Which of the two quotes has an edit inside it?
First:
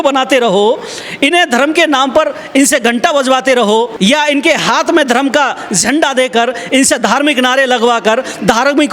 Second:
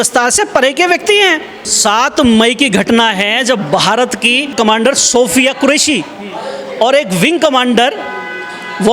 second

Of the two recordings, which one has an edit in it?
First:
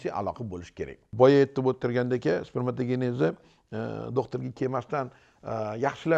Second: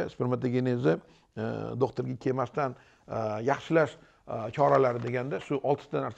first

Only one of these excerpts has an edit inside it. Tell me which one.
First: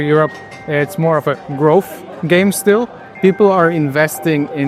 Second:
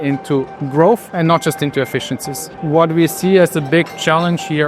second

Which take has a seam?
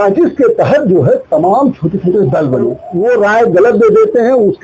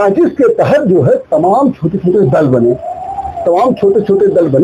first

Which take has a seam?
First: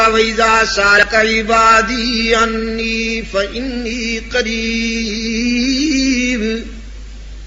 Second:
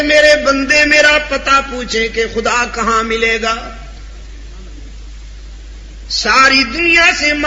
first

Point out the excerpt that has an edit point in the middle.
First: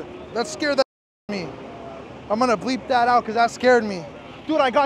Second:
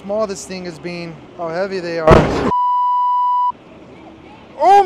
second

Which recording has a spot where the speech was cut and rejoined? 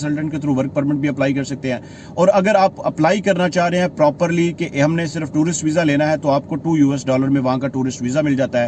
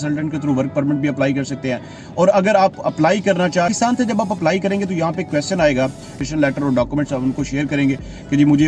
second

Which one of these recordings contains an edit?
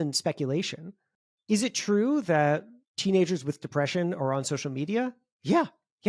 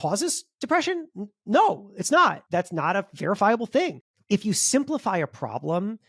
second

